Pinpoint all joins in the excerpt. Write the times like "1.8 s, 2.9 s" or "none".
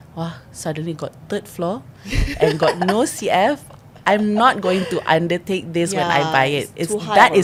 none